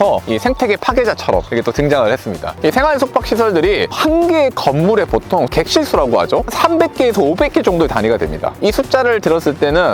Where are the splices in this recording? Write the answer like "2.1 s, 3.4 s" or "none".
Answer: 2.5 s